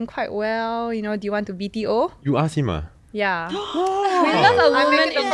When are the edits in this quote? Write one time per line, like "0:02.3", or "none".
none